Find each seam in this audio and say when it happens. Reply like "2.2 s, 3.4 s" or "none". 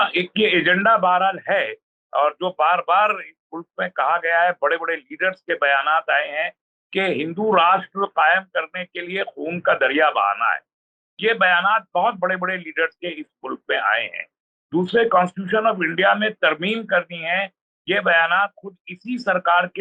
none